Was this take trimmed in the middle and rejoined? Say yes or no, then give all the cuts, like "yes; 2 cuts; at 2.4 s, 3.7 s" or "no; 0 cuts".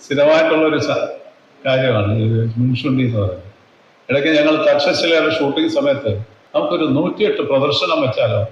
yes; 1 cut; at 6.3 s